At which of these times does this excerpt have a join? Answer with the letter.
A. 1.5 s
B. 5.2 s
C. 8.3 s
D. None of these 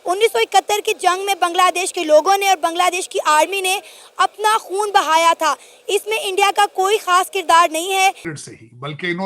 C